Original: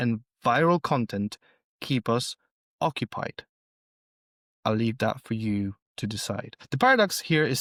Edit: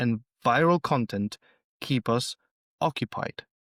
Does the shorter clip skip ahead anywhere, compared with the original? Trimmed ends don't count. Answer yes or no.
no